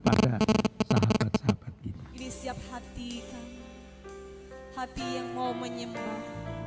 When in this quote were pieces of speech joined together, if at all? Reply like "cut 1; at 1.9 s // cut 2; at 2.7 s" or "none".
cut 1; at 2.1 s